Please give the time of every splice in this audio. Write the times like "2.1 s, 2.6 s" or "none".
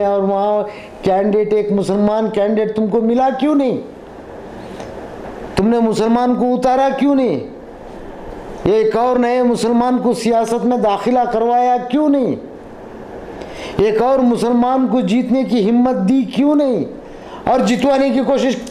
none